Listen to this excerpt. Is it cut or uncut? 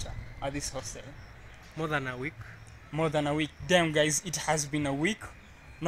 uncut